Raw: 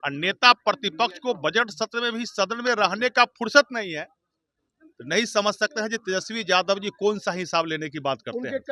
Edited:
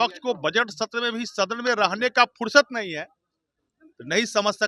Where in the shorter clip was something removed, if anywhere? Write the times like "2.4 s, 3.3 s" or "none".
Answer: none